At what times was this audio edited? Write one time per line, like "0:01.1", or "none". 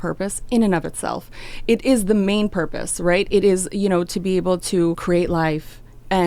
0:05.0